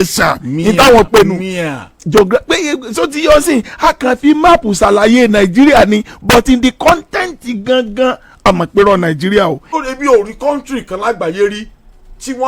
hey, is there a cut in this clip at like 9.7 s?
yes; 1 cut; at 9.7 s

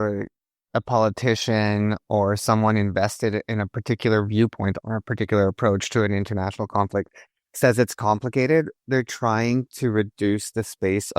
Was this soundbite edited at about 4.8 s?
yes; 1 cut; at 4.8 s

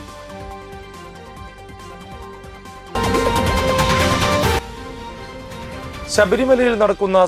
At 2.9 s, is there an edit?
yes; 1 cut; at 2.9 s

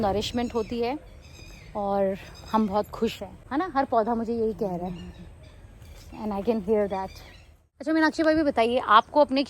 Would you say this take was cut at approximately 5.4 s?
no; 2 cuts; at 3.3 s, 7.9 s

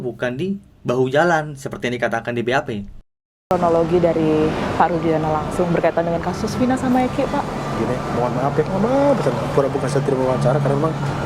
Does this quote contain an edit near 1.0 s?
no; 1 cut; at 3.3 s

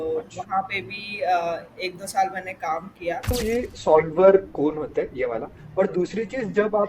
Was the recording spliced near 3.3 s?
yes; 1 cut; at 3.3 s

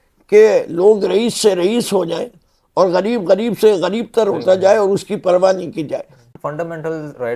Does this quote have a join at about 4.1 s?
no; 1 cut; at 6.3 s

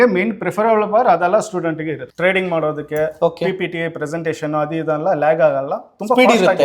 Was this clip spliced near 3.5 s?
no; 1 cut; at 2.1 s

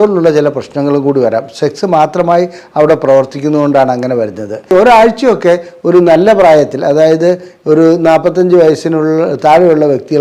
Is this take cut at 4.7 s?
yes; 1 cut; at 4.7 s

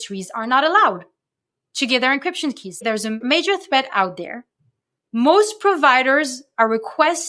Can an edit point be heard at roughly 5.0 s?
no; 1 cut; at 3.1 s

